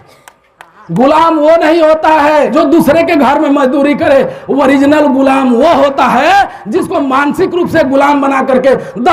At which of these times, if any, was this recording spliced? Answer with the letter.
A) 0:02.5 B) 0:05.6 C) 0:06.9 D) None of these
A